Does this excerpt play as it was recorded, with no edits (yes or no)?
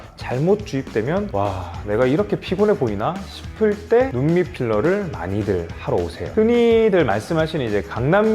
no